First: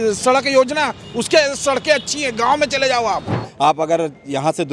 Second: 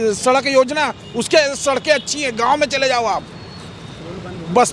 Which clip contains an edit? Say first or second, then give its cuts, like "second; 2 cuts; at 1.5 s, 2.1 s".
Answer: first; 1 cut; at 3.4 s